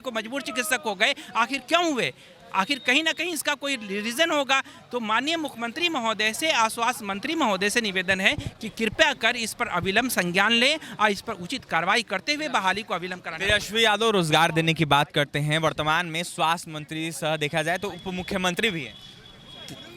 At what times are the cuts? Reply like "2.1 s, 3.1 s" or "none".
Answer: none